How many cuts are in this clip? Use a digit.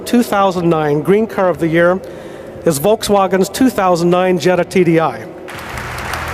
1